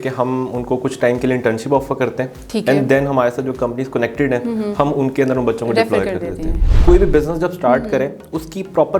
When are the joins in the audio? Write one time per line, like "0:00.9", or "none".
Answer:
0:06.7